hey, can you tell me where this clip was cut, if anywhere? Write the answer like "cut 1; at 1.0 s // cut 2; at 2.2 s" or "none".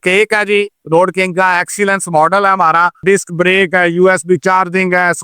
cut 1; at 3.0 s